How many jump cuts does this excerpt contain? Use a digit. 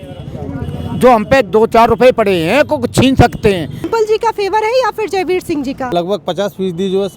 2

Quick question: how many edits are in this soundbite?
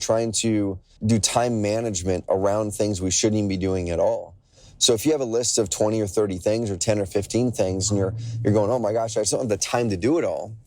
1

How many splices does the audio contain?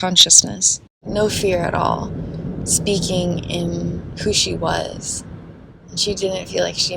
1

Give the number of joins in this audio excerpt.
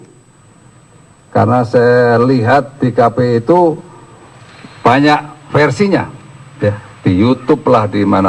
1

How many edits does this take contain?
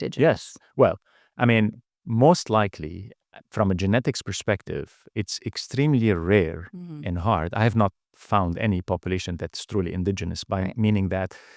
0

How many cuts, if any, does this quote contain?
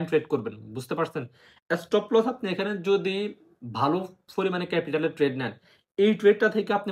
0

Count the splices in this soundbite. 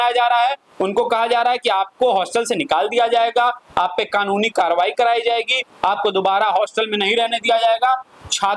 0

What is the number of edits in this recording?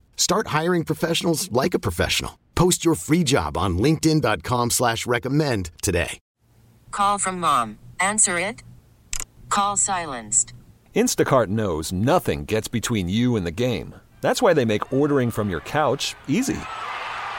1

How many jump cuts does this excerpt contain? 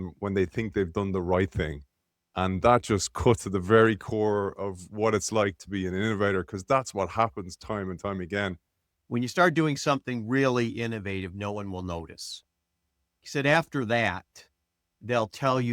1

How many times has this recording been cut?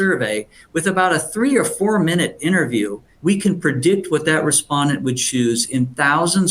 1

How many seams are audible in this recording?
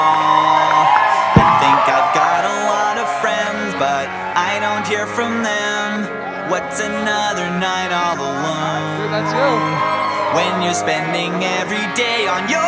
0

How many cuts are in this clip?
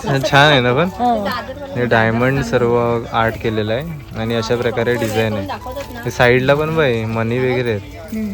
0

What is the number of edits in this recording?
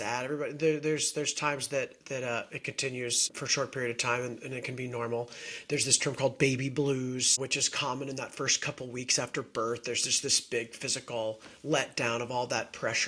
2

